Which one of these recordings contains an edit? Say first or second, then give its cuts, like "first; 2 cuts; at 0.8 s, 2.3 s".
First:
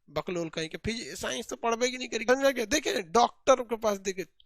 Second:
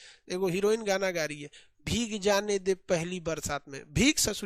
first; 1 cut; at 2.3 s